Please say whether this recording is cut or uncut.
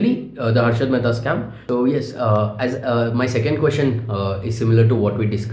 cut